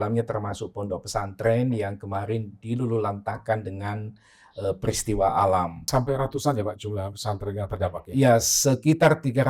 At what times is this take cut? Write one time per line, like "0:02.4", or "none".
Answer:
0:05.8